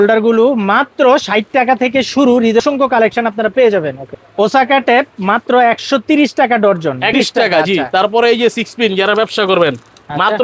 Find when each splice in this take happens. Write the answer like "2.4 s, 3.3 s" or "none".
none